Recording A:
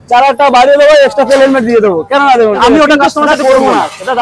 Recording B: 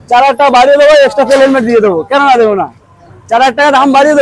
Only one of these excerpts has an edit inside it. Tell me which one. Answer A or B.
A